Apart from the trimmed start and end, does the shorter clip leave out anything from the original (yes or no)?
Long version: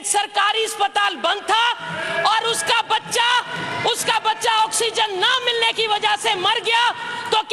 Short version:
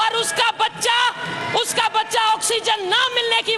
no